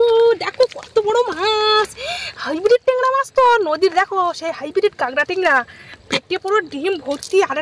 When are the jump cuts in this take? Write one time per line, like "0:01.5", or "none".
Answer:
none